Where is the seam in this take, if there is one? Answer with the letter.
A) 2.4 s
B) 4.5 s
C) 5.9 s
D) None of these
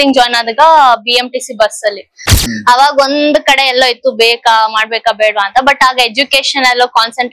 A